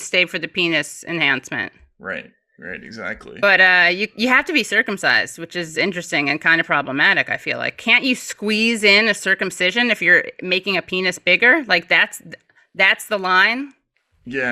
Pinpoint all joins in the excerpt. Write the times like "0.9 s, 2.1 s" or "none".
none